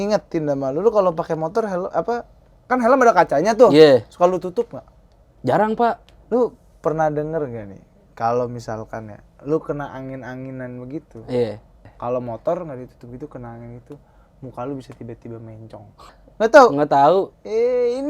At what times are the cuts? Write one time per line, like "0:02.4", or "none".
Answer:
0:06.1
0:11.9
0:16.2